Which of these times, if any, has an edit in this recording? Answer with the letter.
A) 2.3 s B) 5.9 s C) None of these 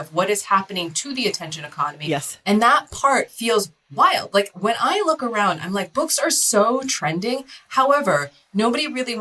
A